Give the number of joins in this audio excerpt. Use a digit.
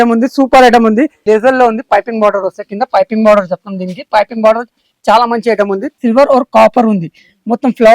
2